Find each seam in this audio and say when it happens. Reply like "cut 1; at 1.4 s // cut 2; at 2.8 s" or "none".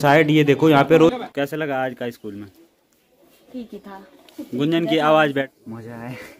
cut 1; at 1.1 s // cut 2; at 5.5 s